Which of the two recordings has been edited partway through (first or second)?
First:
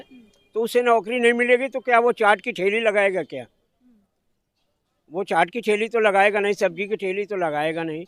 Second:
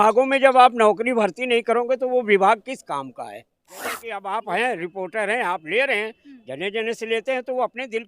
second